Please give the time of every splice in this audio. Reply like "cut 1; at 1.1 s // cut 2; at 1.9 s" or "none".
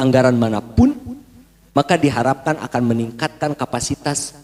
none